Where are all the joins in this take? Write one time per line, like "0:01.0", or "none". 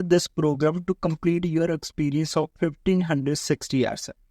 none